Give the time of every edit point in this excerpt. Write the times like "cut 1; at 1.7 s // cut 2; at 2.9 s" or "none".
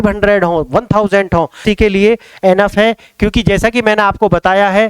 cut 1; at 1.6 s